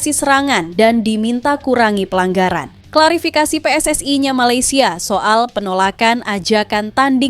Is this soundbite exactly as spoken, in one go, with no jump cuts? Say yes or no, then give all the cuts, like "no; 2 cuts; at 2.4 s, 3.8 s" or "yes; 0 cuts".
no; 1 cut; at 2.8 s